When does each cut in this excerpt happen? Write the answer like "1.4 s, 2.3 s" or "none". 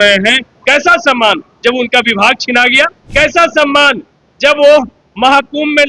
3.0 s